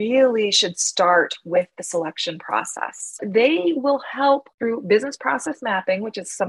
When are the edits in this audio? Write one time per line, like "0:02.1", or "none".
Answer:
0:03.2
0:04.5